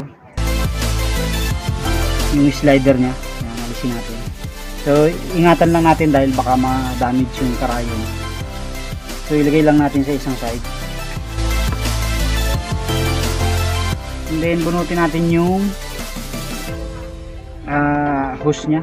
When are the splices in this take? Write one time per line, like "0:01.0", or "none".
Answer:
none

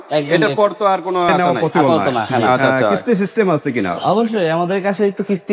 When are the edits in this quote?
0:02.6

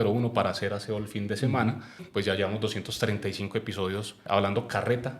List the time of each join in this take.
0:02.0
0:04.2

